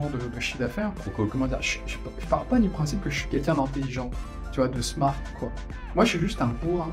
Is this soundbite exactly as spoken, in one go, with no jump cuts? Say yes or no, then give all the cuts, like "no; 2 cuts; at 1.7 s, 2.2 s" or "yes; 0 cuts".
no; 1 cut; at 1.3 s